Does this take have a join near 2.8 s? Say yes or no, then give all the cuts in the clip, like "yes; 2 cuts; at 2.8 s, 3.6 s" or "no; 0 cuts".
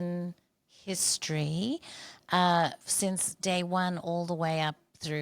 yes; 1 cut; at 2.8 s